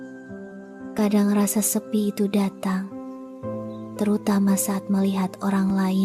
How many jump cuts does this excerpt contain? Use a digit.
1